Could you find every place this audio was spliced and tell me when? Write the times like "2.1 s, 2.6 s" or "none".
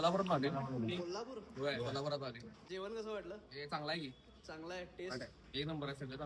2.7 s